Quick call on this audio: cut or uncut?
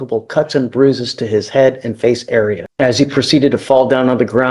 cut